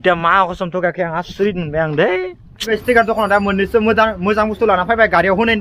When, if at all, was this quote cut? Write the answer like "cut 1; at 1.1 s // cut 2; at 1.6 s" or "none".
cut 1; at 2.7 s